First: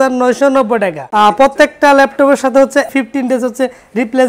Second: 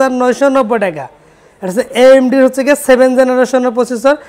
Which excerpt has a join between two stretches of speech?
first; 1 cut; at 1.0 s

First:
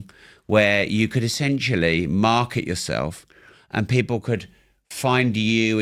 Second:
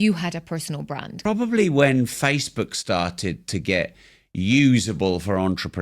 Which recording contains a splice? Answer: second; 1 cut; at 1.1 s

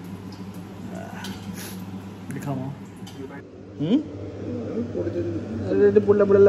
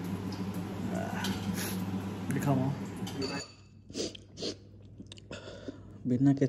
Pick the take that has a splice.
second; 1 cut; at 3.5 s

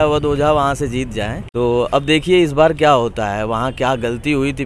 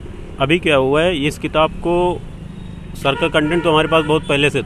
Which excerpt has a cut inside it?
first; 1 cut; at 1.4 s

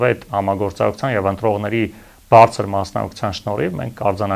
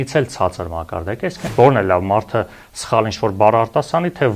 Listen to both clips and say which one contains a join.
second; 1 cut; at 1.4 s

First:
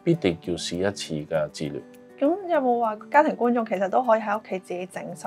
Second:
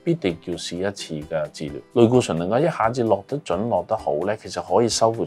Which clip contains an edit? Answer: second; 1 cut; at 1.8 s

